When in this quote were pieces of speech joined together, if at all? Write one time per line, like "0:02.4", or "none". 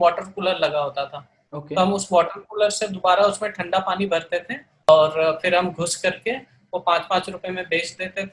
0:04.9